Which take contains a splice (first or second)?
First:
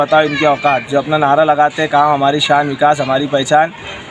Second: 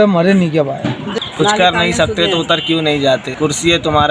second